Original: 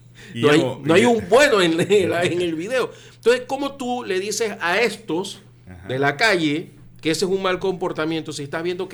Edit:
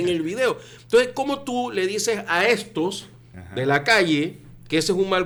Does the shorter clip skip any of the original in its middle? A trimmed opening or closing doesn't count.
no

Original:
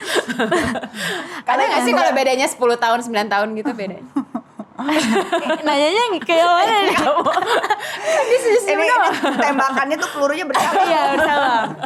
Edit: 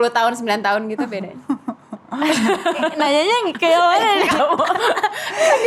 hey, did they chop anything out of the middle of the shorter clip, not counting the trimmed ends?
no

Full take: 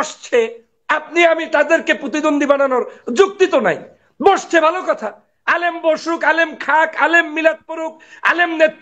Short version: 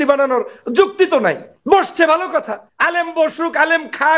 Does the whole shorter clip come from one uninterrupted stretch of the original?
no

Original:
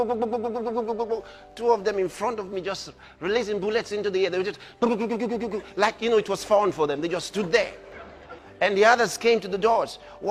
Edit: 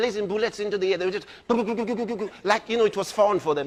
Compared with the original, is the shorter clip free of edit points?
yes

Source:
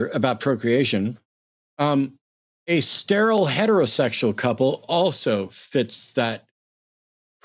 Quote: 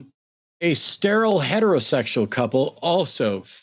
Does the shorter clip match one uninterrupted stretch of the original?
yes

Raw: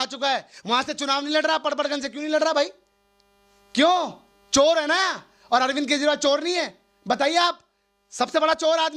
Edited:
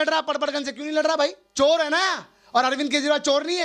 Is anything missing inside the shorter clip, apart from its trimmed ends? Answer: yes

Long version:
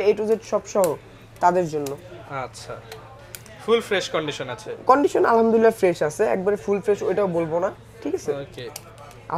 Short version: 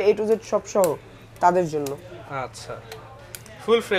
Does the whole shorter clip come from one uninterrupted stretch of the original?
yes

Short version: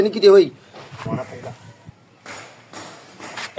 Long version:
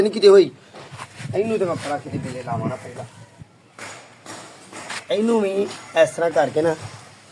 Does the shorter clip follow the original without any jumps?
no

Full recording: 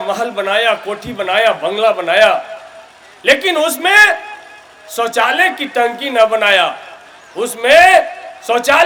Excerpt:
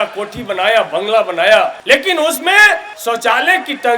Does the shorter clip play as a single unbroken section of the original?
no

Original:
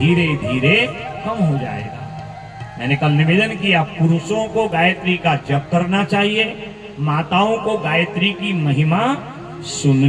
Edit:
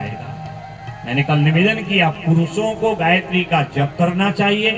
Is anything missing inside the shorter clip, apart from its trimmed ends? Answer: no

